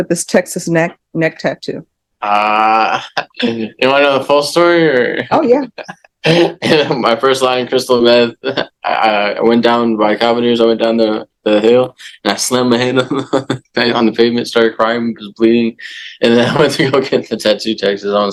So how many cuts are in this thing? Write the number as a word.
zero